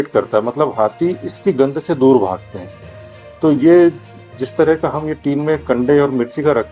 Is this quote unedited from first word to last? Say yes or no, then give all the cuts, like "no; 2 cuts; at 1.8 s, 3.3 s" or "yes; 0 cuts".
yes; 0 cuts